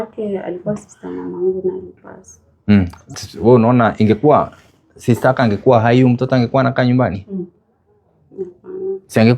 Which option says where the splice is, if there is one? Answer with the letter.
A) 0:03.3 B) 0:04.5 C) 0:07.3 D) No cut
A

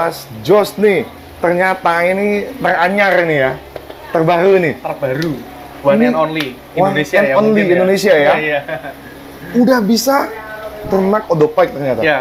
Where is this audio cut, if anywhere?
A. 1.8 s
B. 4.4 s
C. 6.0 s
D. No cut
D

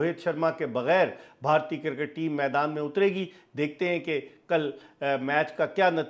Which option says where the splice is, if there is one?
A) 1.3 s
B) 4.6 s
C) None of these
C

